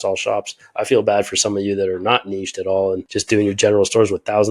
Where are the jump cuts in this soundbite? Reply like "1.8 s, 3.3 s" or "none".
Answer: 3.1 s